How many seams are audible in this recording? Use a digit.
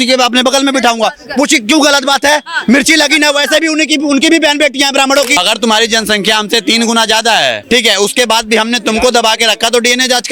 2